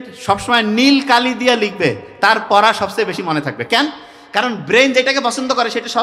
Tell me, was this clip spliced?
no; 0 cuts

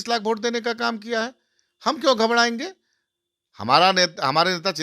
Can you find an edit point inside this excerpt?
no; 0 cuts

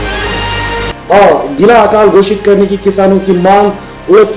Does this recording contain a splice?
yes; 1 cut; at 1.0 s

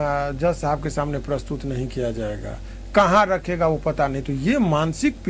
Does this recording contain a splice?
no; 0 cuts

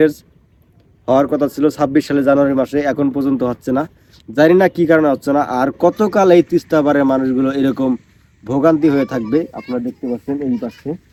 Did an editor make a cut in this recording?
no; 0 cuts

